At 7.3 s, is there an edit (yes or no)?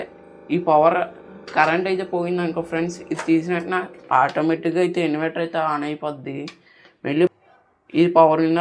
yes